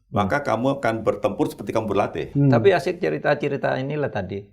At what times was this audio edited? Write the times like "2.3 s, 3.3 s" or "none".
2.2 s